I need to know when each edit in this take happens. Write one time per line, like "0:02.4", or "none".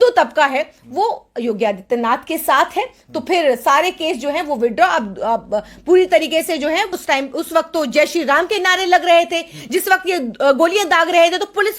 0:06.9